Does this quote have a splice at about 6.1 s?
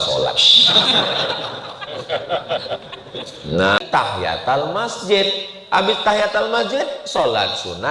no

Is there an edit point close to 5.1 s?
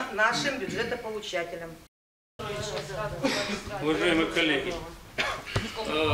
no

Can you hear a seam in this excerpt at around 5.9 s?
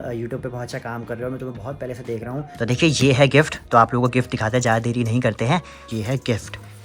yes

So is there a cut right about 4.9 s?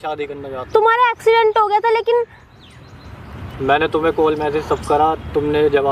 no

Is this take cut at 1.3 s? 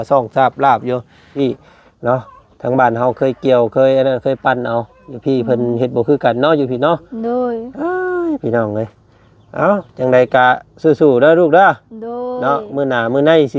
yes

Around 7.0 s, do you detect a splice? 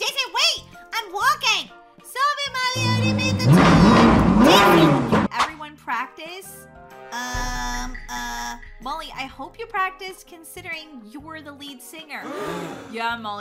no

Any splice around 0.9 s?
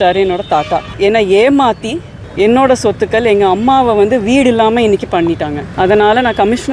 yes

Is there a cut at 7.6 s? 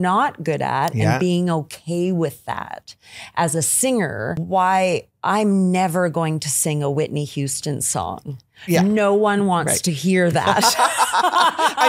no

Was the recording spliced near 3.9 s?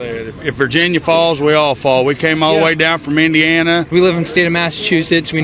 yes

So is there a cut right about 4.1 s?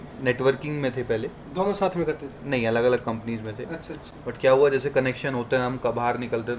no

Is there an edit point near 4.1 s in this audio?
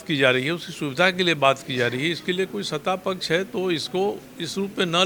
no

